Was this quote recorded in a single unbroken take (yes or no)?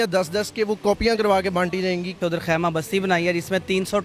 no